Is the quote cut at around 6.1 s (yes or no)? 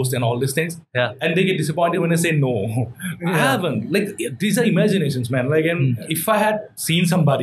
yes